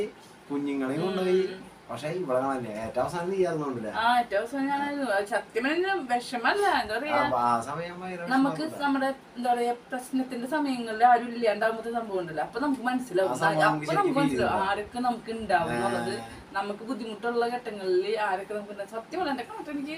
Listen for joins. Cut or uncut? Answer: uncut